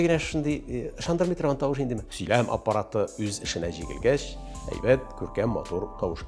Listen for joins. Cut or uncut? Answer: cut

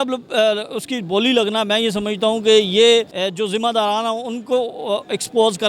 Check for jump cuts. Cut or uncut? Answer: cut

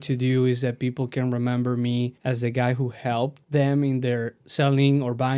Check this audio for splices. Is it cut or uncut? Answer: cut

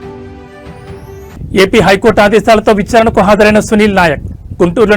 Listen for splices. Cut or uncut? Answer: cut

